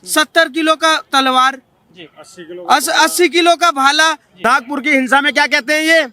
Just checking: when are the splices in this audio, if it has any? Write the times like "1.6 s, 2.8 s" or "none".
4.3 s